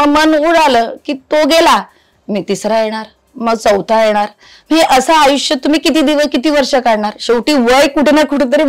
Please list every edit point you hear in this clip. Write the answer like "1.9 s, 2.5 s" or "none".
none